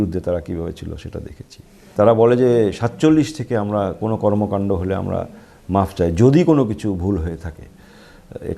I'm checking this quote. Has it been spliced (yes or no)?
yes